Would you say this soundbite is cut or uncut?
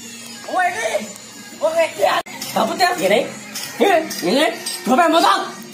cut